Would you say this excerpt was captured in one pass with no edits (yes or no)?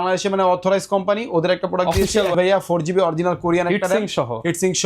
no